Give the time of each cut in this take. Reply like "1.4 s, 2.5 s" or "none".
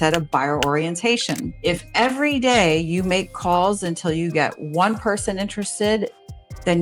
1.5 s